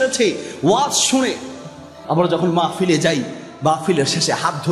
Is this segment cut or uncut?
cut